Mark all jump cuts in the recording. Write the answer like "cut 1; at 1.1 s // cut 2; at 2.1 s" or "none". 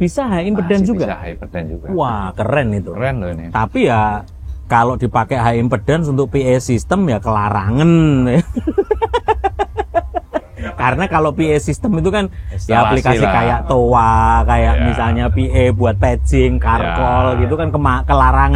none